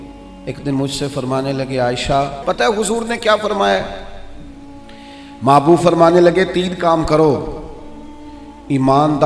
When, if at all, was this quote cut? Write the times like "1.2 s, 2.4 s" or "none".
2.4 s